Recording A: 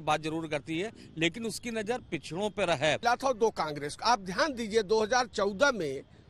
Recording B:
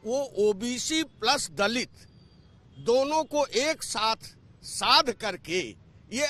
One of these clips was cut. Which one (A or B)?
A